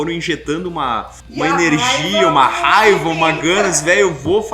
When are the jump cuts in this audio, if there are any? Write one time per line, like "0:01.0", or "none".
0:01.2